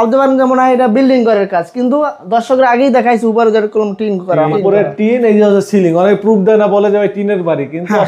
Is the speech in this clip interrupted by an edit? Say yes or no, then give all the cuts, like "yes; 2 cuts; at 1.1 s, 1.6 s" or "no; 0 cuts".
yes; 1 cut; at 4.5 s